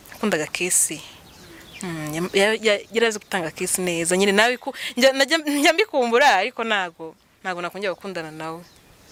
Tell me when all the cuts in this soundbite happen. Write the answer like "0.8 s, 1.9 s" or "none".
none